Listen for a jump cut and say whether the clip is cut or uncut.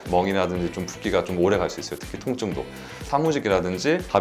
cut